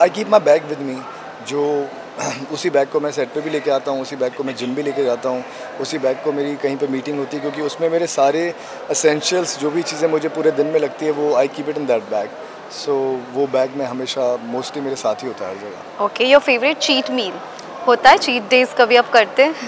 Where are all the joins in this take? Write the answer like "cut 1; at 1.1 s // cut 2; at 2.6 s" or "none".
none